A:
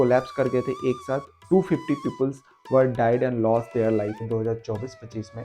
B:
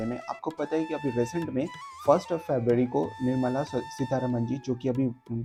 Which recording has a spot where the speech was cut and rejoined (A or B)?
A